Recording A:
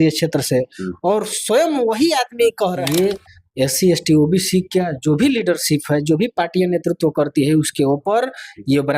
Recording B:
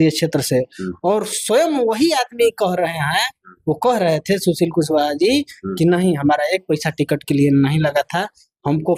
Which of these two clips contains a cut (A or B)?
A